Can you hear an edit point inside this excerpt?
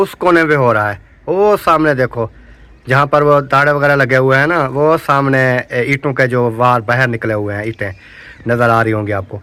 no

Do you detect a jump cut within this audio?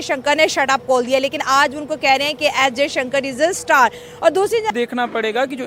yes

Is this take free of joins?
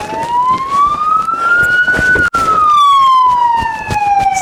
yes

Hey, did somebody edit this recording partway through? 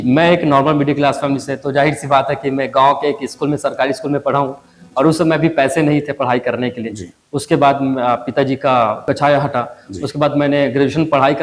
no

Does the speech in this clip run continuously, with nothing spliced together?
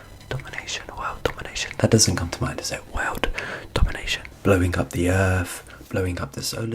no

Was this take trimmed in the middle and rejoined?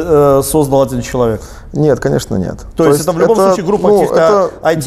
no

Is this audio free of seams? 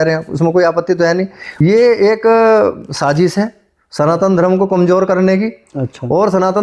no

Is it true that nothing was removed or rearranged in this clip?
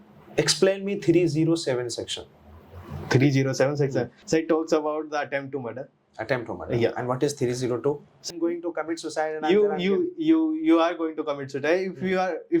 no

